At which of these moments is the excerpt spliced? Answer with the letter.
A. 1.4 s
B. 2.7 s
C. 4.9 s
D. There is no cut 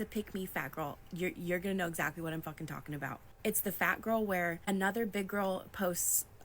A